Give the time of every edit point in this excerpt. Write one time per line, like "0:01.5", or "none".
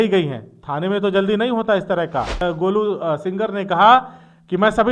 0:02.4